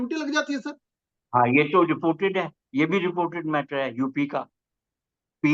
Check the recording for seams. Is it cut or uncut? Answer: uncut